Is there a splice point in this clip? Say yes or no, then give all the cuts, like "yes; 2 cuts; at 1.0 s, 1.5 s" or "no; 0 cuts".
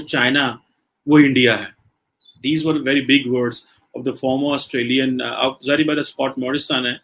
no; 0 cuts